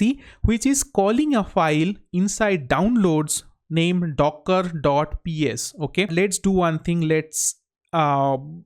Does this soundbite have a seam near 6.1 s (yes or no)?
yes